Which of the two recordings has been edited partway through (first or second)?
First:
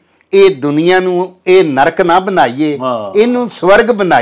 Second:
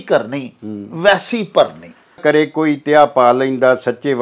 second